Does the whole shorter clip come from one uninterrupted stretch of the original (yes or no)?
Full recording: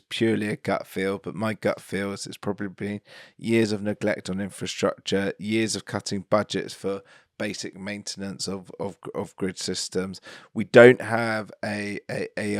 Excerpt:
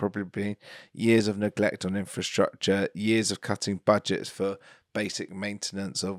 yes